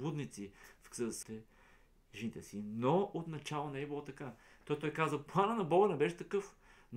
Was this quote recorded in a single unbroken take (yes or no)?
no